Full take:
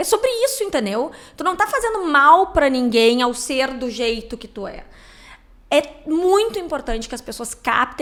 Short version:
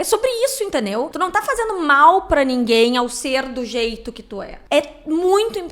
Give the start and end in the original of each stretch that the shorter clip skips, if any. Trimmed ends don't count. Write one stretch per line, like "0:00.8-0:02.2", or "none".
0:01.1-0:01.4
0:04.8-0:05.5